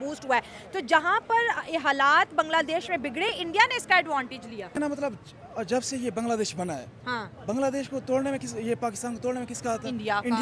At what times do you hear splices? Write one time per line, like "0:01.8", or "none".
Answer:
0:04.7

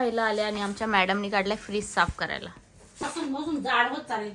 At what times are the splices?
0:03.0

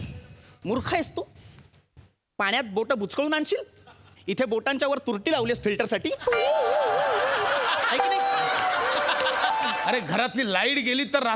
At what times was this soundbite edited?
0:09.8

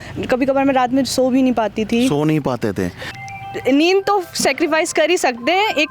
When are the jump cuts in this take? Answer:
0:03.1

